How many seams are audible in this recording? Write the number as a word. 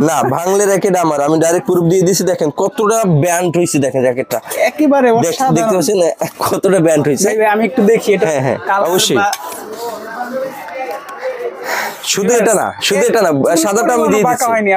zero